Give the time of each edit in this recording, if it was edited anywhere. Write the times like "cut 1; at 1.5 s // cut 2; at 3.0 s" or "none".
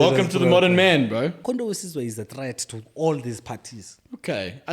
cut 1; at 1.4 s